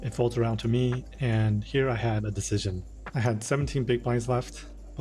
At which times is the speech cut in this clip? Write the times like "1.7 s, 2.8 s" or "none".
none